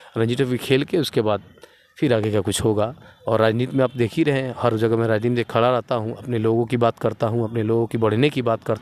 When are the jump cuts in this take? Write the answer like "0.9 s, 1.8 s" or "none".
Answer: none